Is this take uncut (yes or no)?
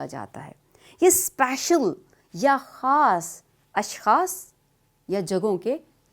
no